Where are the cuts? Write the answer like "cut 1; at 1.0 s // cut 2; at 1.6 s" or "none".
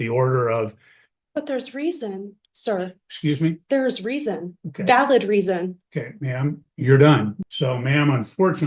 cut 1; at 7.4 s

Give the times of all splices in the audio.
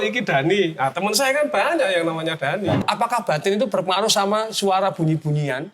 cut 1; at 2.8 s

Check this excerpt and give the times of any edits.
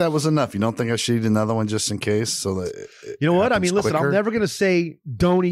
none

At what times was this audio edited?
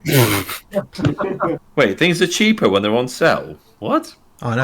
cut 1; at 1.6 s

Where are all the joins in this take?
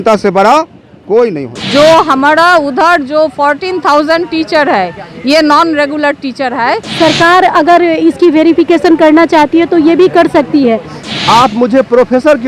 cut 1; at 1.5 s // cut 2; at 6.8 s // cut 3; at 11.0 s

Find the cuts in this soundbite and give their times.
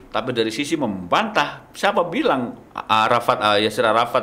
cut 1; at 2.6 s

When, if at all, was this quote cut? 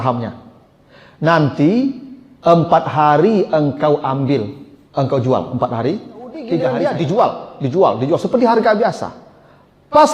cut 1; at 6.6 s

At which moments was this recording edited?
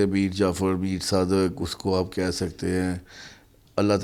none

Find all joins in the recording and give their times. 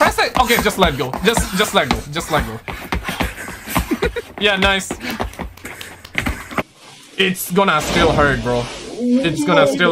cut 1; at 6.8 s

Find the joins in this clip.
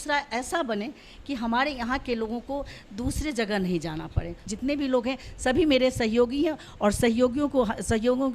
cut 1; at 4.4 s

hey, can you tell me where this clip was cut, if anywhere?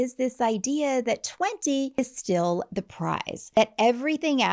cut 1; at 2.0 s // cut 2; at 3.6 s

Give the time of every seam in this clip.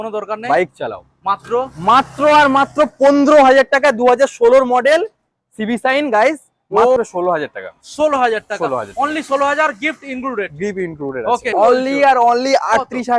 cut 1; at 7.0 s // cut 2; at 11.5 s

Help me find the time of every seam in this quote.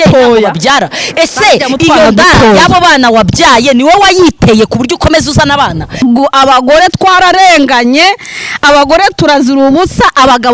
cut 1; at 6.0 s

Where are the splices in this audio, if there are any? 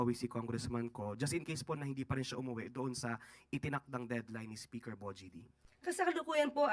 none

